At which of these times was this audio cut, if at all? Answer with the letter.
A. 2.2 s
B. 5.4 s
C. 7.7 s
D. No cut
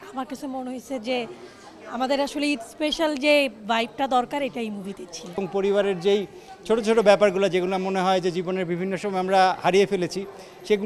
B